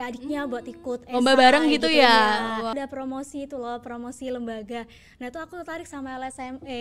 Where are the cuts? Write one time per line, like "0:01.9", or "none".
0:02.7

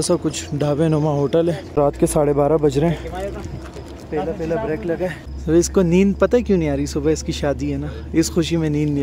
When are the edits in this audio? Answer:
0:01.7
0:05.3

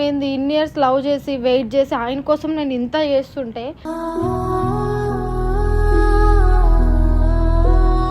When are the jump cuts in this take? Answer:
0:03.8

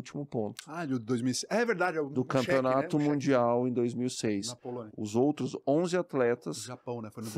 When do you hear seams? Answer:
0:04.9

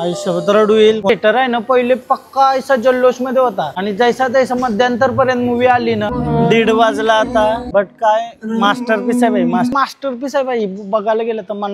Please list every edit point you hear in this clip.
0:01.1
0:06.1
0:09.7

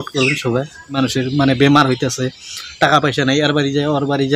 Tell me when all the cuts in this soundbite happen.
0:01.0

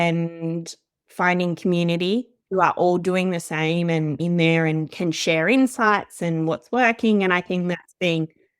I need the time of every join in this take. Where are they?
0:04.2

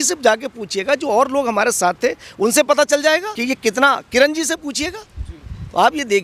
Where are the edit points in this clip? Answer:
0:03.3

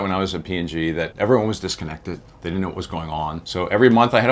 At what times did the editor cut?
0:01.1
0:02.3
0:03.4

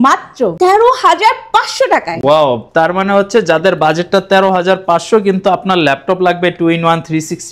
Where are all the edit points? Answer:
none

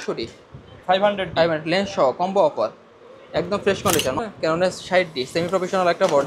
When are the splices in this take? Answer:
0:04.2

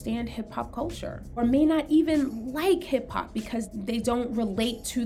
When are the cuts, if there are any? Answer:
0:01.4
0:03.7

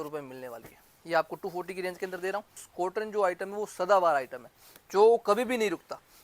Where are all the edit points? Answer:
0:02.7

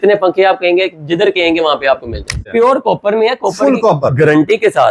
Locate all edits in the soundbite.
0:02.4

